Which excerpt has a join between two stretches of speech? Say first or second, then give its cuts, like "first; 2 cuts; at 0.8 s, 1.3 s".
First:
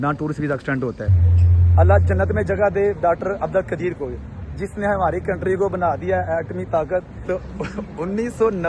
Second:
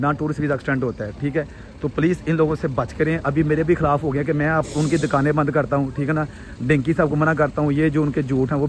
first; 2 cuts; at 1.1 s, 7.1 s